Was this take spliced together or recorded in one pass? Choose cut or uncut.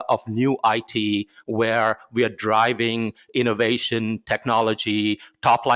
uncut